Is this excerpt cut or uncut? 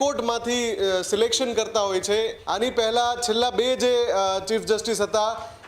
cut